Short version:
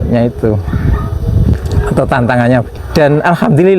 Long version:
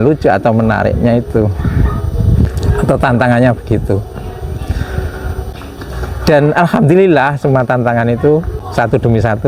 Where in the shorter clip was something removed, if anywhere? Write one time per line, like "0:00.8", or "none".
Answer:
0:02.7